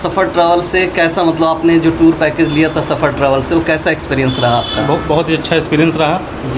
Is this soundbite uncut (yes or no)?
yes